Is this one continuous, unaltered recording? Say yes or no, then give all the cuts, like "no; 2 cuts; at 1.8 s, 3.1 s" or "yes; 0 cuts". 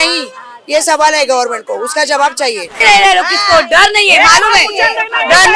no; 1 cut; at 2.8 s